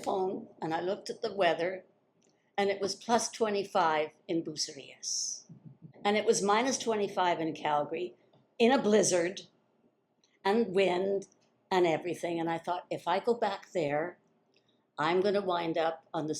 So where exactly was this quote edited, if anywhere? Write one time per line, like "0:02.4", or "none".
0:05.9